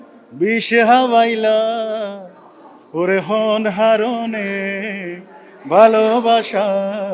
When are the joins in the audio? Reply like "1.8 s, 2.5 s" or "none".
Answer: none